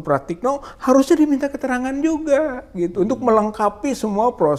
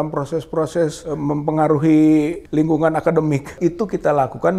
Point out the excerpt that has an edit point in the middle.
second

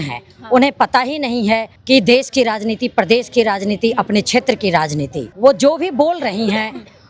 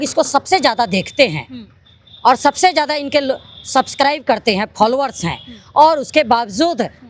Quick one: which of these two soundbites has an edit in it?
first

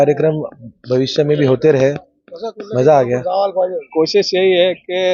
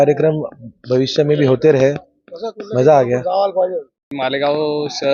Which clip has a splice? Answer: first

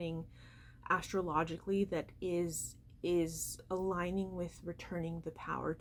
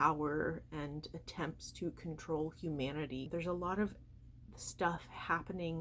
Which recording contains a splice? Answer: second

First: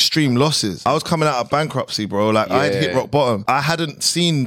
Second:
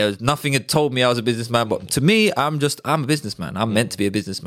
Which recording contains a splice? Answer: first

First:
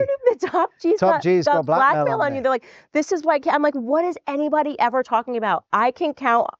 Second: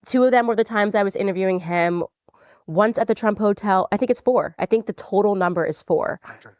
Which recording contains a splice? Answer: second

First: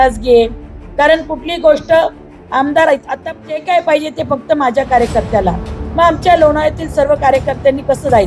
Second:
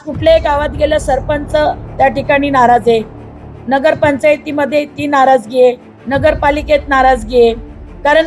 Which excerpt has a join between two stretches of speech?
first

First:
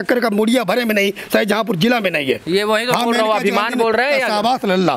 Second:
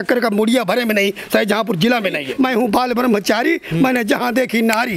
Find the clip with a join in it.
second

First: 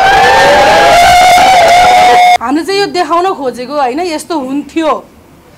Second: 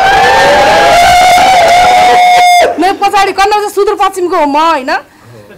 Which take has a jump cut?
first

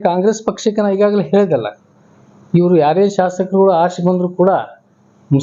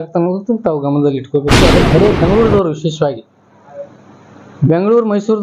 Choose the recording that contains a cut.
second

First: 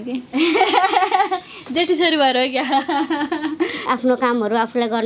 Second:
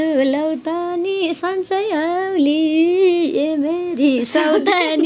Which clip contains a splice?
first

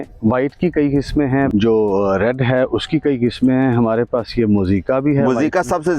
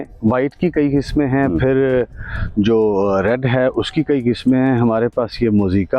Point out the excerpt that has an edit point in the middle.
first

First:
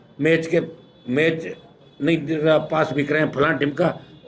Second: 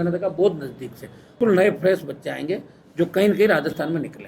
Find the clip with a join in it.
second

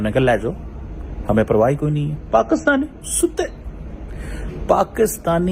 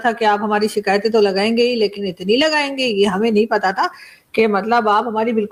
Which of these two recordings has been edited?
first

